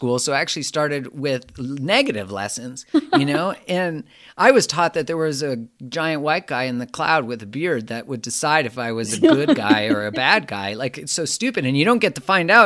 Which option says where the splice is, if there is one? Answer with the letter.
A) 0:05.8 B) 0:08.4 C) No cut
C